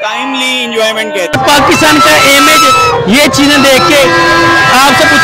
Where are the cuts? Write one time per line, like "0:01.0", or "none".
0:01.4